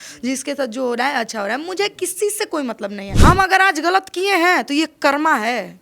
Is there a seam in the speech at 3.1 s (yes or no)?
yes